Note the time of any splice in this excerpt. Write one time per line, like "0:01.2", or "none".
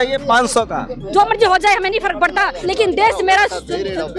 0:02.6